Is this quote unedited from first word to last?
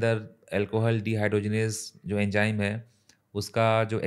yes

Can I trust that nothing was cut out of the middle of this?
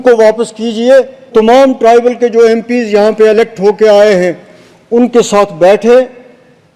no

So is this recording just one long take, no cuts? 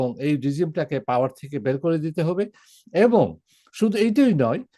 yes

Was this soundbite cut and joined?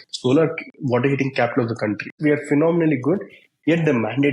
yes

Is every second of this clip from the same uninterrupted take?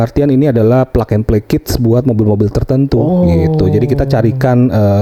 yes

